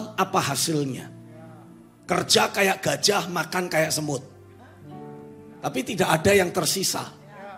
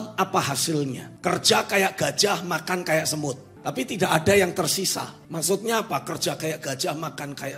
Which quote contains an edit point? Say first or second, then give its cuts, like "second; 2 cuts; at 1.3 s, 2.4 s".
second; 3 cuts; at 1.1 s, 3.5 s, 5.2 s